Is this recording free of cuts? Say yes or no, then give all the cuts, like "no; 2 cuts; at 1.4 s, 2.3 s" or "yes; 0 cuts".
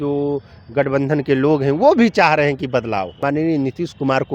no; 1 cut; at 3.1 s